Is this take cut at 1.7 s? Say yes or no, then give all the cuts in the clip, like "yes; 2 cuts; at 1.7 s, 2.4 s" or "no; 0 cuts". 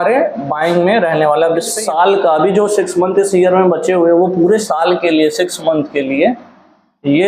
yes; 1 cut; at 1.7 s